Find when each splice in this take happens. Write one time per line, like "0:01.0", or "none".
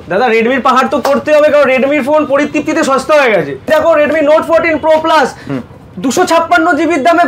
0:03.7